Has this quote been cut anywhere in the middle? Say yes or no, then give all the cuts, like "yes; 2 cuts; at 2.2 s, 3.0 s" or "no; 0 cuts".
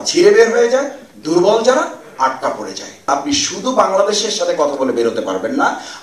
yes; 1 cut; at 3.1 s